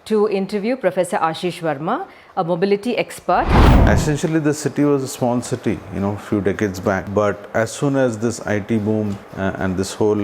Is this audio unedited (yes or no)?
no